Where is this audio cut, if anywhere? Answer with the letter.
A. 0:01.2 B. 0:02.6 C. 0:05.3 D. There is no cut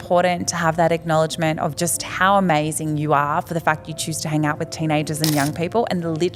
D